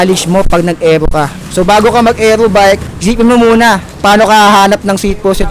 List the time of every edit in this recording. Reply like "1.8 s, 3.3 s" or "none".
1.4 s, 2.9 s, 3.9 s